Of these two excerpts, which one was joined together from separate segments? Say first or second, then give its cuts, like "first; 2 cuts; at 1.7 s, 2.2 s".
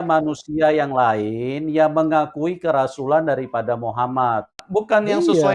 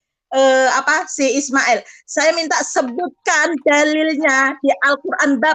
first; 1 cut; at 4.6 s